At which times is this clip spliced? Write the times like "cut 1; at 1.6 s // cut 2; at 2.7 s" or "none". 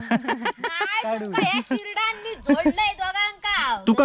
none